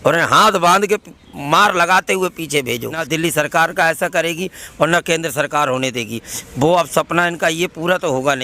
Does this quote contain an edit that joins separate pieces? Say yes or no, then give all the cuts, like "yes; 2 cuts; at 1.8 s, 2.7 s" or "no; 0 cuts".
yes; 1 cut; at 3.0 s